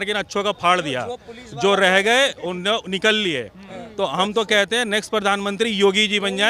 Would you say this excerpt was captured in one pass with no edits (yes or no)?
yes